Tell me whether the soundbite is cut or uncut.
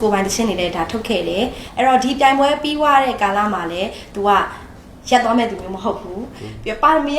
cut